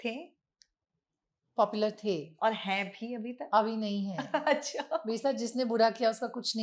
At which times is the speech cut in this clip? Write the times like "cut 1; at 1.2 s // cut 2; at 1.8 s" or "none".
none